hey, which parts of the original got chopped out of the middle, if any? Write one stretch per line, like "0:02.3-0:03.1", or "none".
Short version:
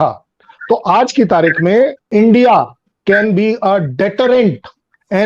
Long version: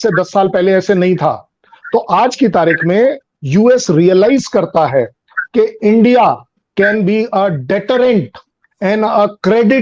0:03.3-0:05.7